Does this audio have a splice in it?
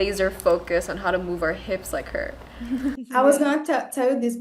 yes; 1 cut; at 3.0 s

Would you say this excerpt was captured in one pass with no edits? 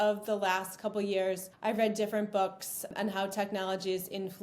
no; 2 cuts; at 1.5 s, 2.9 s

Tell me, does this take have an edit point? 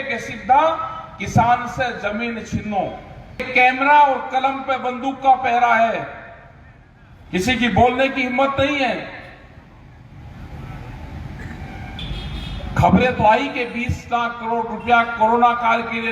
yes; 2 cuts; at 3.5 s, 12.0 s

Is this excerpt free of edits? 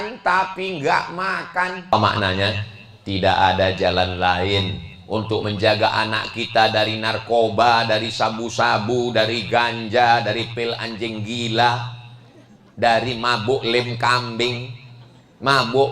no; 1 cut; at 1.9 s

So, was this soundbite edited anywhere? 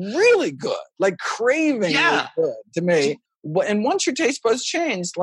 yes; 1 cut; at 3.3 s

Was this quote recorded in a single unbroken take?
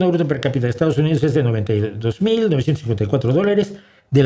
yes; 0 cuts

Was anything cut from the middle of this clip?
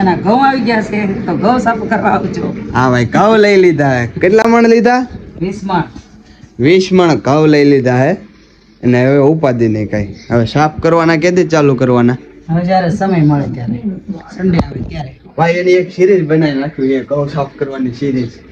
no; 0 cuts

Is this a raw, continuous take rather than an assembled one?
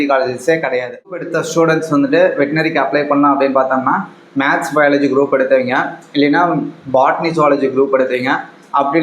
no; 1 cut; at 1.3 s

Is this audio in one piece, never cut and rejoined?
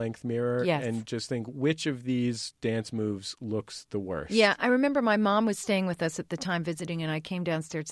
yes; 0 cuts

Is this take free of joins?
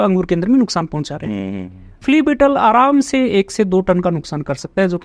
no; 1 cut; at 1.9 s

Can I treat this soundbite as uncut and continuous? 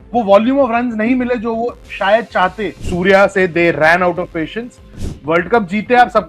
no; 1 cut; at 2.8 s

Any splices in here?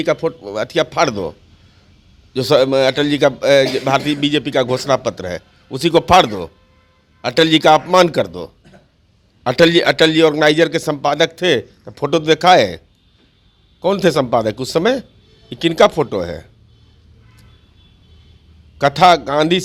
no; 0 cuts

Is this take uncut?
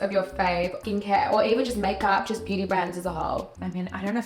yes; 0 cuts

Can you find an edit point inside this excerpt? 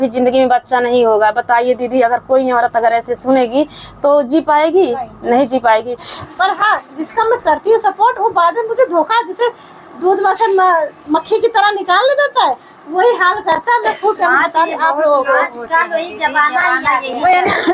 yes; 1 cut; at 6.2 s

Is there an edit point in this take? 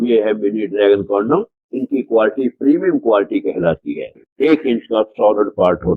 yes; 1 cut; at 4.2 s

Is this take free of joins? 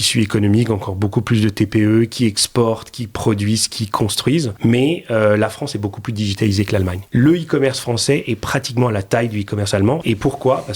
no; 3 cuts; at 4.5 s, 7.0 s, 10.0 s

